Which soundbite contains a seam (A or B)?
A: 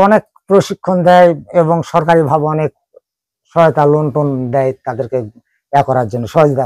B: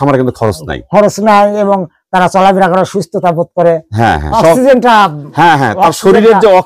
B